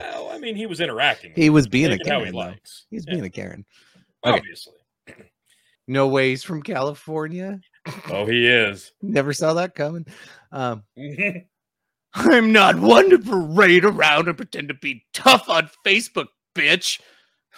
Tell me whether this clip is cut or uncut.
cut